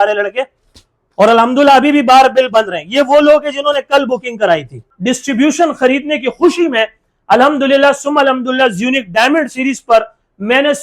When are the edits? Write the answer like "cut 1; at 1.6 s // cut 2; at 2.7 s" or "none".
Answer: cut 1; at 4.9 s